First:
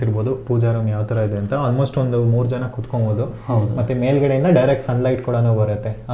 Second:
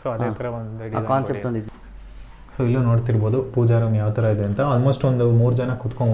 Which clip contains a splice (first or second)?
second